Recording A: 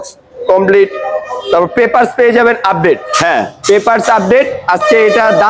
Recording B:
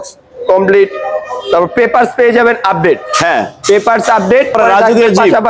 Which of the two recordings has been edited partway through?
B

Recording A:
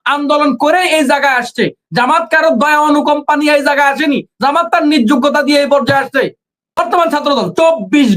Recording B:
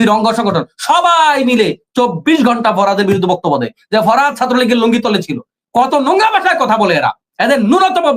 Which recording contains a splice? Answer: A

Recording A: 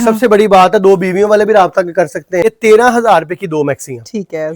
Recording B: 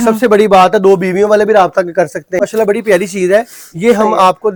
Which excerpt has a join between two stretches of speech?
A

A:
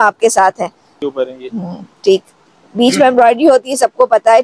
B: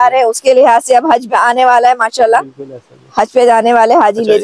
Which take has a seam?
A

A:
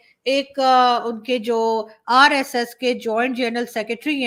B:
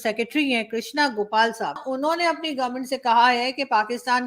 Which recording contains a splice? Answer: B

